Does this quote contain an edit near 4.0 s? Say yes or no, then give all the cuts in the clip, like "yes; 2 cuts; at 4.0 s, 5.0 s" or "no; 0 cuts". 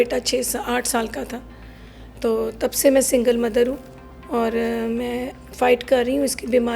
no; 0 cuts